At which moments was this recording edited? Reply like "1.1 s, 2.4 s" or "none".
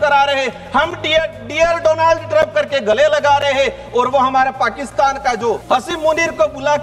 5.6 s